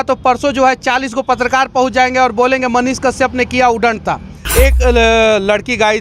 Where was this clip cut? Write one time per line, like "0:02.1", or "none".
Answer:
0:04.4